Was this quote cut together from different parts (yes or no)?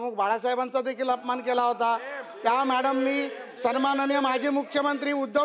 no